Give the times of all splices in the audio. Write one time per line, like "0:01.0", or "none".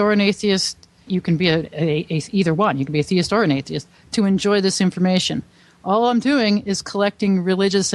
0:01.1